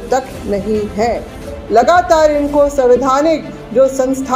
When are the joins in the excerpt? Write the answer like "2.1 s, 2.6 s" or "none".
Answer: 1.6 s